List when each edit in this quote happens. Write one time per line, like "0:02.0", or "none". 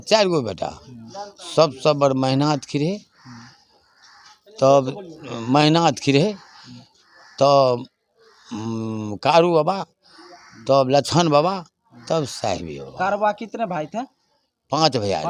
none